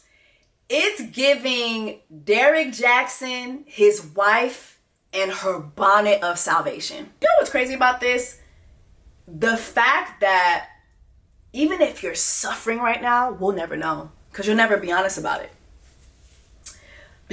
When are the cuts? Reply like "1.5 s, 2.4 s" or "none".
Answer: none